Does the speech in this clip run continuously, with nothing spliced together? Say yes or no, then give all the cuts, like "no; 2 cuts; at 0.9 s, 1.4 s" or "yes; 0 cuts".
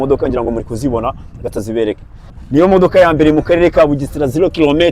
no; 1 cut; at 2.4 s